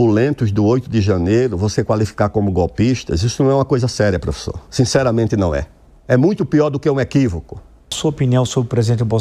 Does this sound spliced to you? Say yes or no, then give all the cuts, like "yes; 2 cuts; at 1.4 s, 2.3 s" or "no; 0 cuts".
yes; 1 cut; at 8.0 s